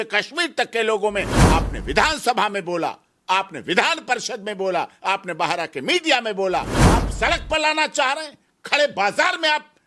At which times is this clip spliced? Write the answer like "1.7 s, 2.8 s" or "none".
1.4 s, 6.8 s